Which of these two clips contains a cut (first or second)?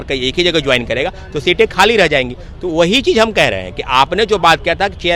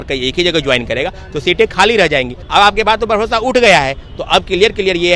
second